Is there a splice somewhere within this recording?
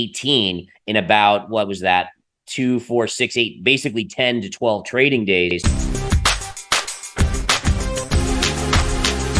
yes; 1 cut; at 5.6 s

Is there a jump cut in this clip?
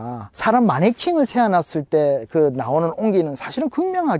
no; 0 cuts

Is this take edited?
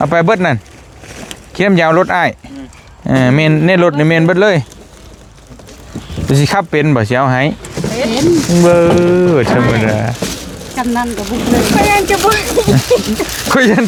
no; 0 cuts

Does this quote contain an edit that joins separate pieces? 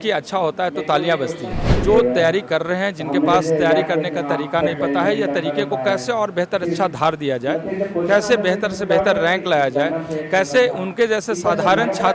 yes; 1 cut; at 1.7 s

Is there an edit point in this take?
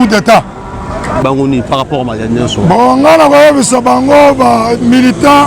yes; 1 cut; at 1.2 s

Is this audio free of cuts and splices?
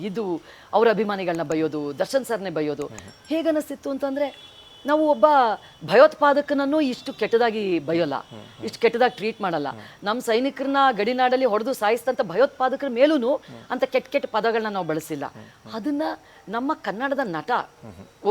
yes; 0 cuts

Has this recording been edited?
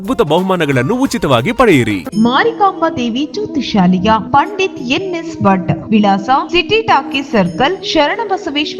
yes; 1 cut; at 2.0 s

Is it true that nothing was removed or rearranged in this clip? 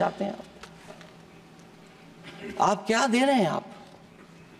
yes; 0 cuts

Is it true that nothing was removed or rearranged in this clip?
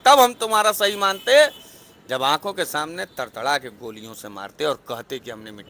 yes; 0 cuts

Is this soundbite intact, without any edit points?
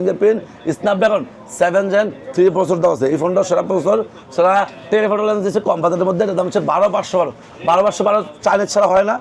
yes; 0 cuts

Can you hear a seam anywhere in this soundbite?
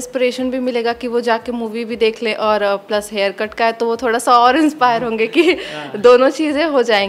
no; 0 cuts

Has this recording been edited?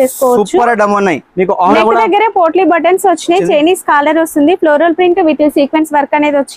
yes; 1 cut; at 1.7 s

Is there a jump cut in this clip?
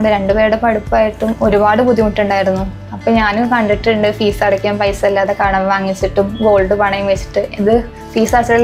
no; 0 cuts

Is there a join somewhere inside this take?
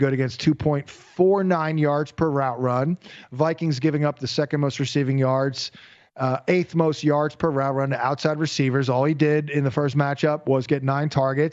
no; 0 cuts

